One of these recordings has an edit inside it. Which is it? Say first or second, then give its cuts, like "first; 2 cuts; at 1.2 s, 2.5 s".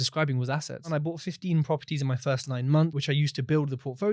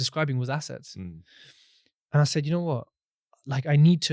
first; 2 cuts; at 0.9 s, 2.9 s